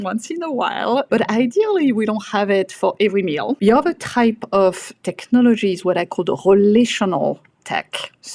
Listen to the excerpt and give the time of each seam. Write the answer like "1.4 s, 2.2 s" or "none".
1.1 s, 3.6 s